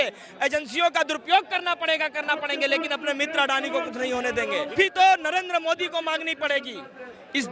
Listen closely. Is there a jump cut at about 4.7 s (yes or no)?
yes